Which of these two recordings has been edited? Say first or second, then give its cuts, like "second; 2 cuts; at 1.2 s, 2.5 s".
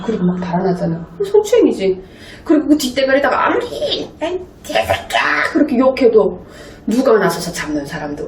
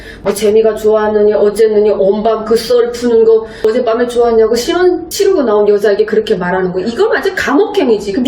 second; 1 cut; at 3.6 s